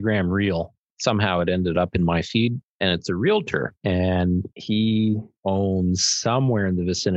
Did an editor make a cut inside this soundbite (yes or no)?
yes